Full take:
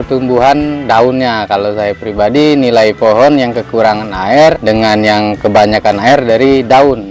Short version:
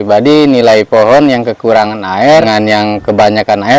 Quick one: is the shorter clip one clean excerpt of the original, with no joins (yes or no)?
no